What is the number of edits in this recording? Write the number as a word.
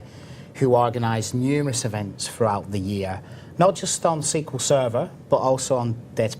one